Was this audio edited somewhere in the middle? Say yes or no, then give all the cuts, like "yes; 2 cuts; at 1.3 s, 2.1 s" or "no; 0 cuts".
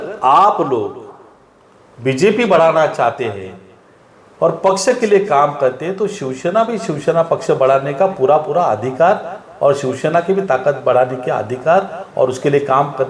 no; 0 cuts